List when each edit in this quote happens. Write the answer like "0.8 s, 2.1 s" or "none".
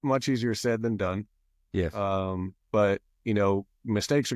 none